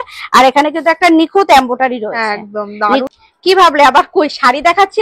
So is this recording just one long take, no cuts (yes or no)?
no